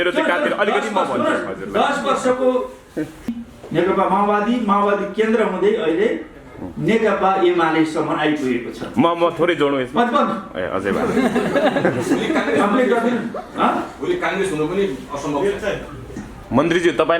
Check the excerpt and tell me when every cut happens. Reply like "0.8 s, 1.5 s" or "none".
3.3 s, 16.1 s